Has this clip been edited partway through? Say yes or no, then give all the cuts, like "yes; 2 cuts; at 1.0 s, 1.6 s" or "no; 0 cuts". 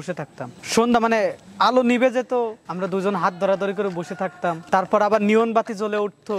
yes; 2 cuts; at 2.6 s, 4.6 s